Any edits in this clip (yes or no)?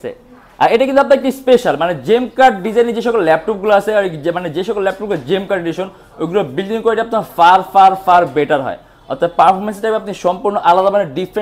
no